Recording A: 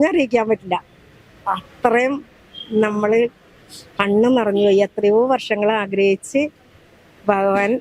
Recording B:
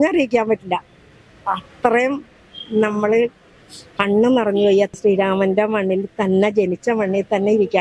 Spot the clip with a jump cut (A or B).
B